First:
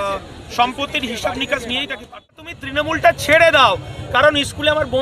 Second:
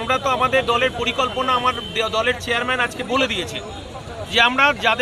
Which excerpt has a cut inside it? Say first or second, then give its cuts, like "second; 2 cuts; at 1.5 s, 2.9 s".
first; 1 cut; at 2.5 s